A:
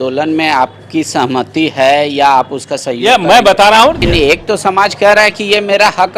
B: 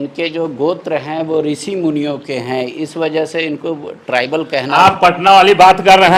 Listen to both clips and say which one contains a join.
A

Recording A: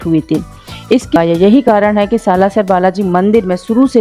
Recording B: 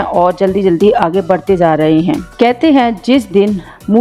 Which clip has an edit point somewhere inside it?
A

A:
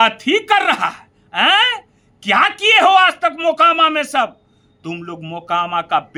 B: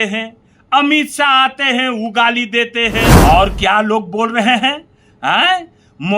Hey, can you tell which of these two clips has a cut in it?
B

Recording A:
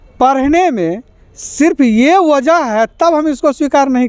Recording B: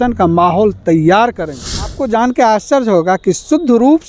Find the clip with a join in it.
B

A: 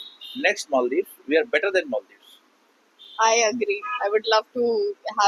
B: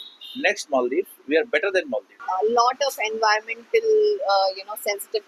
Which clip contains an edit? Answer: B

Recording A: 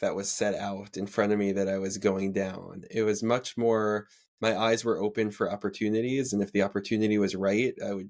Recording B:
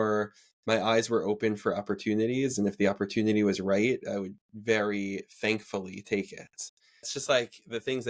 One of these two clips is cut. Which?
B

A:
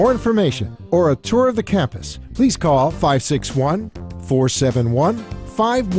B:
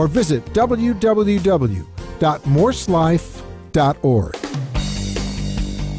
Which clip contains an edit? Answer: B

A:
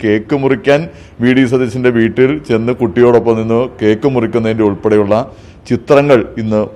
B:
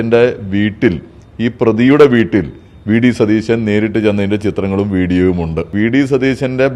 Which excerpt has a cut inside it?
B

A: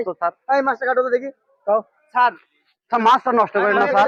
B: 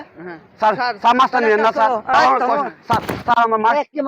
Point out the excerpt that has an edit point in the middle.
B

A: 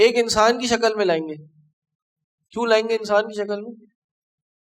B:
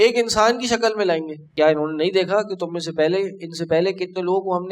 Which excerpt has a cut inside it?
B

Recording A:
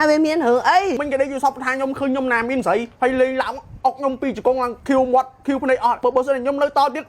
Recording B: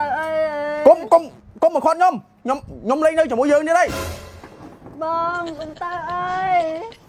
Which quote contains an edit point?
A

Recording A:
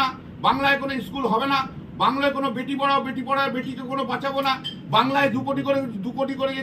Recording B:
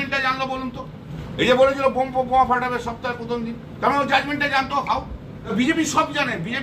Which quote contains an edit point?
B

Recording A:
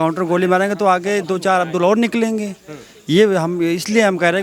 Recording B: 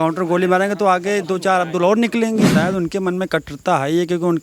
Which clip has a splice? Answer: B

